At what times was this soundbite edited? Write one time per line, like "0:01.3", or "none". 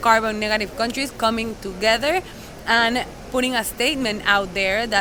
none

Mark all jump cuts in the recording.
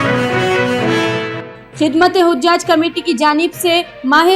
0:01.0

